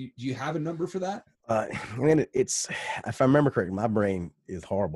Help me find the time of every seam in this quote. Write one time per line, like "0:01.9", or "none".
0:01.3